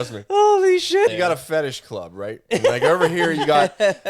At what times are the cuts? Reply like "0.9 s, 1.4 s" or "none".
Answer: 1.1 s